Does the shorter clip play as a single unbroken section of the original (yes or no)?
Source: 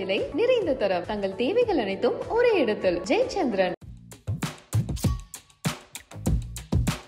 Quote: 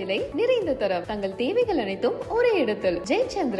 yes